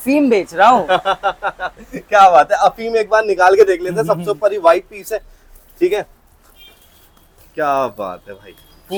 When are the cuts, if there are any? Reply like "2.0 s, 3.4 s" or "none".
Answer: none